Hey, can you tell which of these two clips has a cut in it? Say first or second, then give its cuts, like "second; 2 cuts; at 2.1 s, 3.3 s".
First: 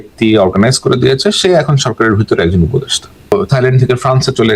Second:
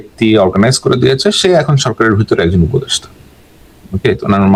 first; 1 cut; at 3.3 s